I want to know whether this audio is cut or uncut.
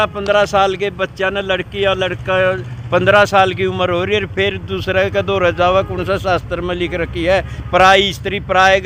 uncut